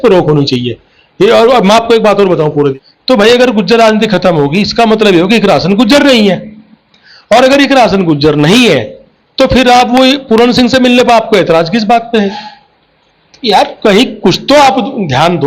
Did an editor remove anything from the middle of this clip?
yes; 1 cut; at 2.8 s

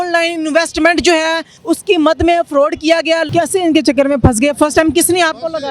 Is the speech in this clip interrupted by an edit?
yes; 2 cuts; at 1.5 s, 3.3 s

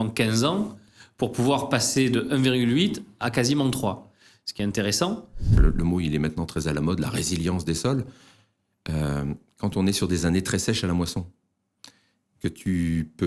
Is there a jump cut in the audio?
yes; 1 cut; at 5.6 s

